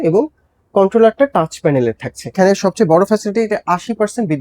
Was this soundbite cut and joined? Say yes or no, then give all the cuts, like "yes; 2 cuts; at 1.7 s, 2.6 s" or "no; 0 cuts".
yes; 1 cut; at 2.3 s